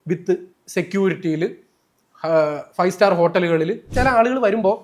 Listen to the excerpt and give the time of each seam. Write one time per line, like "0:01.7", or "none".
0:03.9